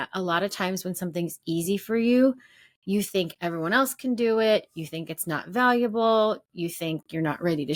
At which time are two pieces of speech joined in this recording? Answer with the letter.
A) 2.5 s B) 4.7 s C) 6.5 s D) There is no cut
D